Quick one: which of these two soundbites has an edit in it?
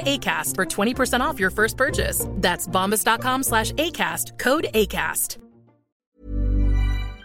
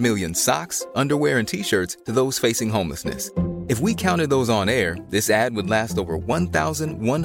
first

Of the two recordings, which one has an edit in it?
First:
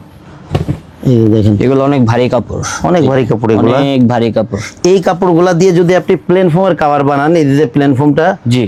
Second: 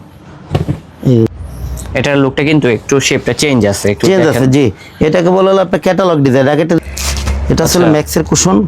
second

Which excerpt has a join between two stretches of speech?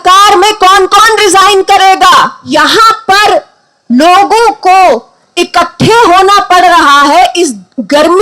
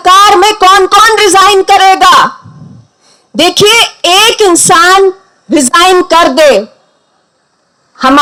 first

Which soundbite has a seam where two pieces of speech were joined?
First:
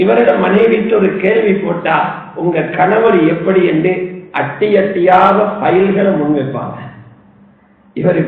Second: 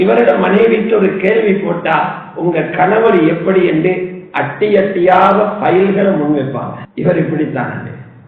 second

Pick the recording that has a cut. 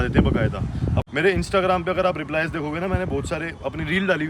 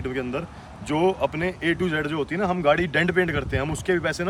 first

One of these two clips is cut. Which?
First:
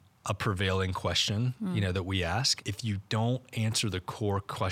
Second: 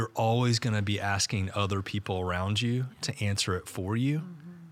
first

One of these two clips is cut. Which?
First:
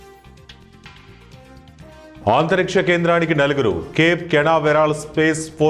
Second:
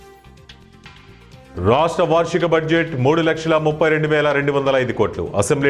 second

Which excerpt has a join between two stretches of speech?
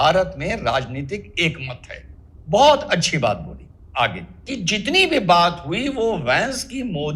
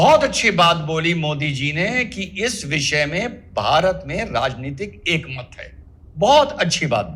first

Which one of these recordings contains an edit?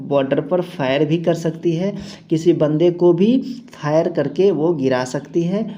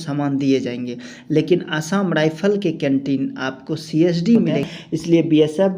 second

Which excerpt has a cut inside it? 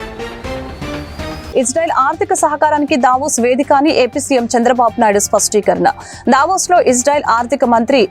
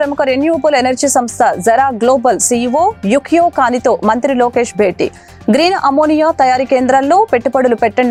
first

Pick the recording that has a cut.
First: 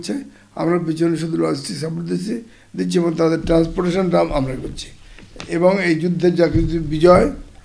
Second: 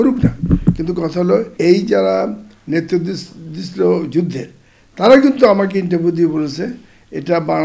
second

